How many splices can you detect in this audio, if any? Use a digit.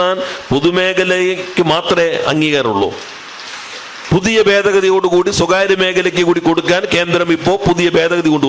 0